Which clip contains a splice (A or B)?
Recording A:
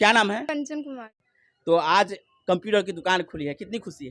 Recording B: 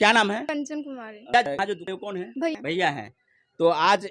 A